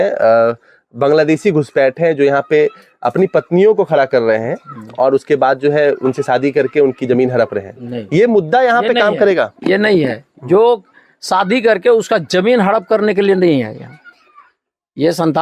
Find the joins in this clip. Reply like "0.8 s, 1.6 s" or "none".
none